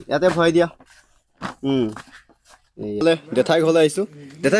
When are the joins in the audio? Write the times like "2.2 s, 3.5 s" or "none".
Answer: 3.0 s